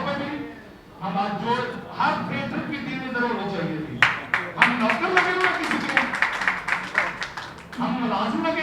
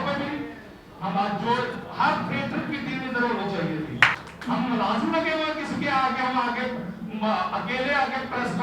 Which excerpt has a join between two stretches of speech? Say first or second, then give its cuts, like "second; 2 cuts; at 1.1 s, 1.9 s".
second; 1 cut; at 4.2 s